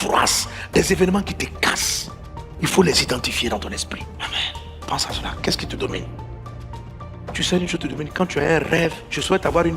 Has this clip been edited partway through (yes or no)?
no